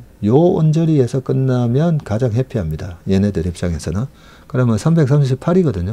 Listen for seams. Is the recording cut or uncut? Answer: uncut